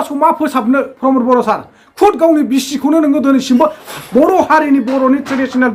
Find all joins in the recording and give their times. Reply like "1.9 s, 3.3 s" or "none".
none